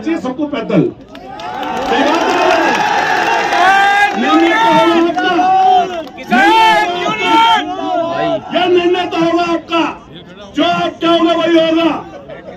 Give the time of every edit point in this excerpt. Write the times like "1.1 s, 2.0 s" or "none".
none